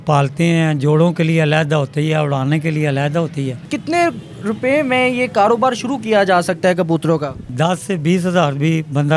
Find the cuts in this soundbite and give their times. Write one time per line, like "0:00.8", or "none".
0:03.7
0:07.5